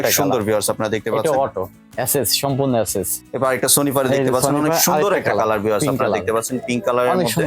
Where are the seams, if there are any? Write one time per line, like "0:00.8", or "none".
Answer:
0:01.8
0:03.2